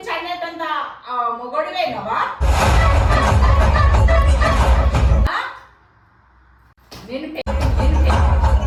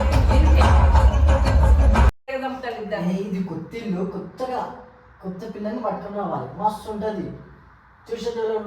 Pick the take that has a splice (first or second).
second